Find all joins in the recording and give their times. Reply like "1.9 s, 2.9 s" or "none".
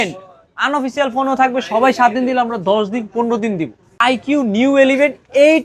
4.0 s